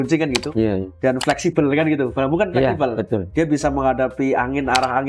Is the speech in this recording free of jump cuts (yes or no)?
yes